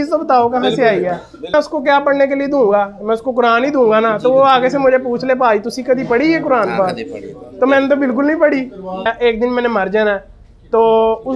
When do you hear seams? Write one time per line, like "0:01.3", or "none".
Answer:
0:01.5
0:09.1

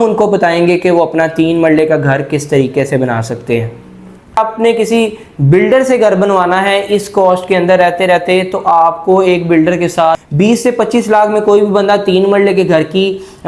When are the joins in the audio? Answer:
0:04.4
0:10.2

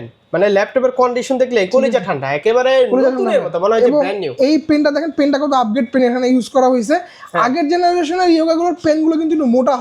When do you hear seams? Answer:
none

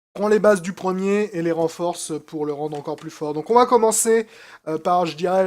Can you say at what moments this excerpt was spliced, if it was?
0:02.0

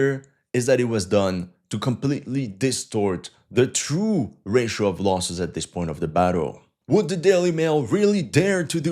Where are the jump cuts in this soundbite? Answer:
none

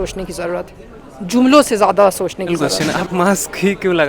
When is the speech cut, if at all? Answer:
0:02.7

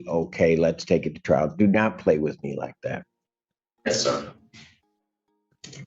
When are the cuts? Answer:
none

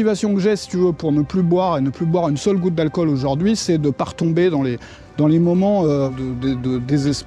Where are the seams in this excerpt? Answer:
0:06.1

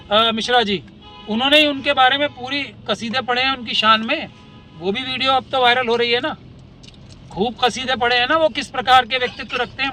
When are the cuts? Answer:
none

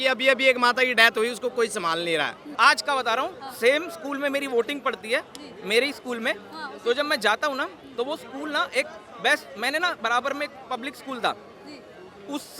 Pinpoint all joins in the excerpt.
0:02.5

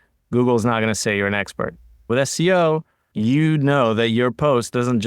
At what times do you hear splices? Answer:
0:02.0
0:03.0

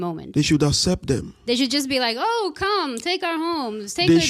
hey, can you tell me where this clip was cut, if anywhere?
0:01.6

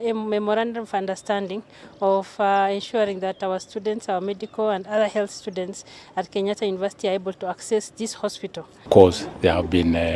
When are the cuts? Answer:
0:08.8

